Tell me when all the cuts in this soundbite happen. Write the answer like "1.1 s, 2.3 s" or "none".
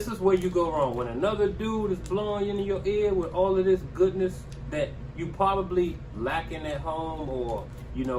none